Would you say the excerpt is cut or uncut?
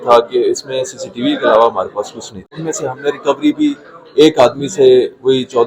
cut